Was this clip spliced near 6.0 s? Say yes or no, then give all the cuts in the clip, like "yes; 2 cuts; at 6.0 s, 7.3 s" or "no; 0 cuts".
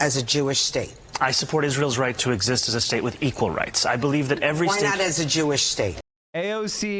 yes; 1 cut; at 6.0 s